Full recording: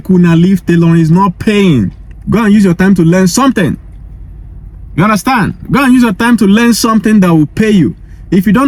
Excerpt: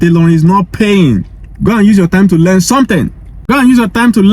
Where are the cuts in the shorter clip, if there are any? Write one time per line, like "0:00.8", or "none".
0:03.3

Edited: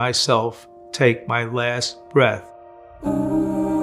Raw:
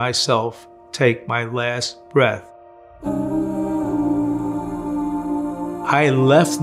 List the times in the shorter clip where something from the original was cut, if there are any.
none

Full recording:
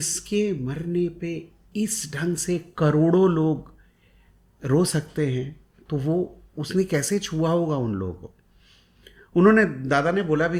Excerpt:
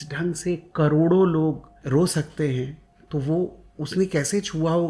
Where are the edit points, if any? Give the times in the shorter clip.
0:01.7

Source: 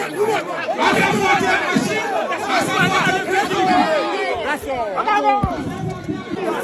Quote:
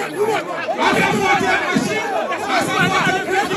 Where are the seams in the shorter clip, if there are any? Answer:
none

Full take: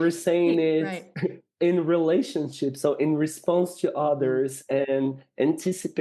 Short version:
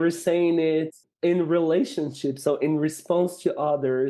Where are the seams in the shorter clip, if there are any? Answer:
0:01.0

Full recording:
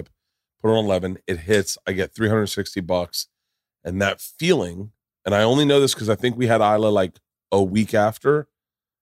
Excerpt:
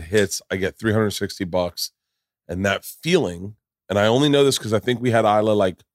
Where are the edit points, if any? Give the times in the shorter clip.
none

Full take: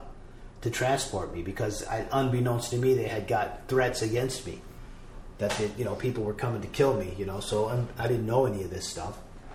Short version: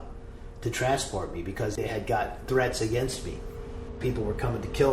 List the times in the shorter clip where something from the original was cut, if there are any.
0:01.8
0:04.0

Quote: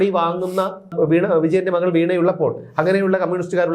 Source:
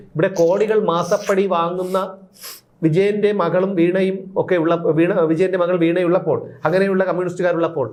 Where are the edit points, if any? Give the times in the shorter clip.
0:00.9

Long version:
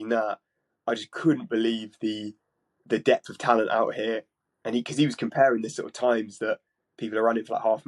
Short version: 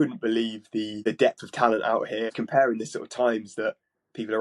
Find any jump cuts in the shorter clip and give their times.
0:00.9
0:02.4

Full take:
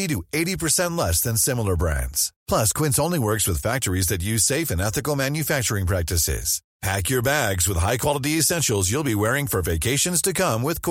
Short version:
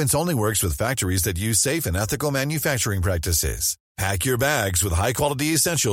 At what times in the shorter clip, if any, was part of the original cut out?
none

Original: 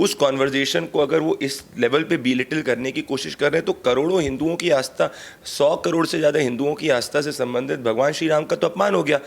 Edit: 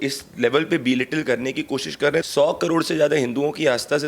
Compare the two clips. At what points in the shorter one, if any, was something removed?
0:02.2

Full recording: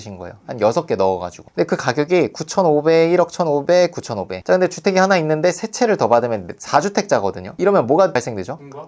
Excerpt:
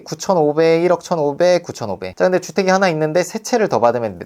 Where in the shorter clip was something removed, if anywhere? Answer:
none

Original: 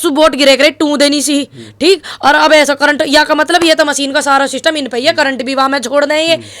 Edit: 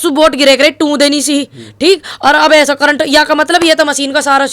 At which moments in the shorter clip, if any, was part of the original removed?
none

